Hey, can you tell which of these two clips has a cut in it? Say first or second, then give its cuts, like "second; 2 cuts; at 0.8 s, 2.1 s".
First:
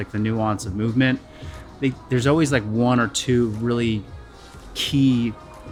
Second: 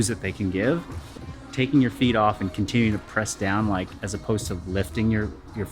second; 1 cut; at 1.4 s